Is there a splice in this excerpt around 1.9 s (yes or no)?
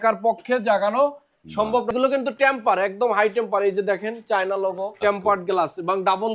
yes